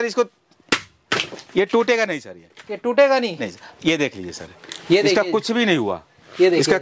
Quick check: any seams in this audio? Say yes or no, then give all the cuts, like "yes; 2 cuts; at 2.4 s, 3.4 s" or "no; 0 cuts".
no; 0 cuts